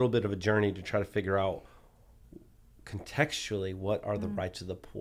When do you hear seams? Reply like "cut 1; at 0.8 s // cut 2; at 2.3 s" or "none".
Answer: none